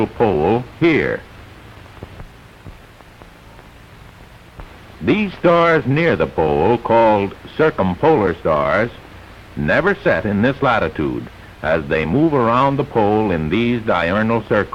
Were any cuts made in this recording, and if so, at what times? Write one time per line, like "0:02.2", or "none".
none